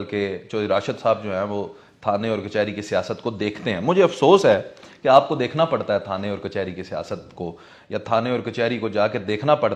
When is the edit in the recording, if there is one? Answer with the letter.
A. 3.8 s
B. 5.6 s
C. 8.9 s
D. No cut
D